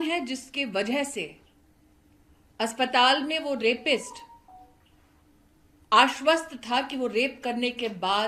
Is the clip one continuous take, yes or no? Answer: yes